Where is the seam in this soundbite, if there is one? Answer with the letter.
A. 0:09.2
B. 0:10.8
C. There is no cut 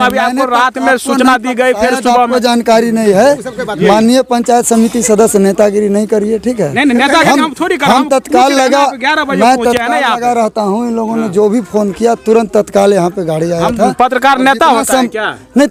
C